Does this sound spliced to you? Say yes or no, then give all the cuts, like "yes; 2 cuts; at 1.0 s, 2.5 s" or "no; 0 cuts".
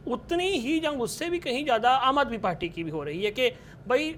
no; 0 cuts